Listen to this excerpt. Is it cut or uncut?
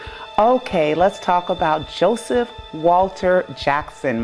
uncut